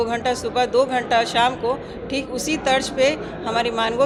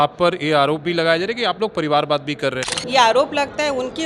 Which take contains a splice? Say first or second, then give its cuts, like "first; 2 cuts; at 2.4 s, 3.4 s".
second; 1 cut; at 2.7 s